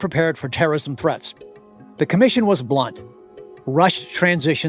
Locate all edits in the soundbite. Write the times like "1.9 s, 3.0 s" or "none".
none